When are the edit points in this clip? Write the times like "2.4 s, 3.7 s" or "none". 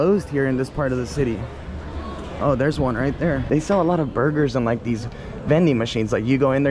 3.4 s